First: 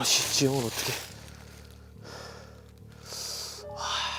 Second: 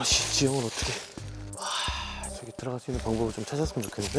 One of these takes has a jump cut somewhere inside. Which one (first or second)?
second